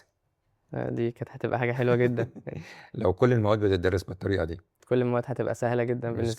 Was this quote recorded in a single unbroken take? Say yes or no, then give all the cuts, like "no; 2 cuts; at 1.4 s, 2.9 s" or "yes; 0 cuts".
no; 1 cut; at 4.8 s